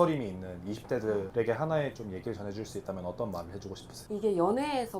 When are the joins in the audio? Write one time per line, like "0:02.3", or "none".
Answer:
0:01.3
0:03.9